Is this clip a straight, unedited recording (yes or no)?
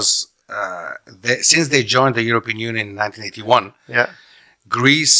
yes